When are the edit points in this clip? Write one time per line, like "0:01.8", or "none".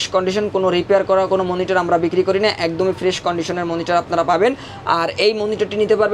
none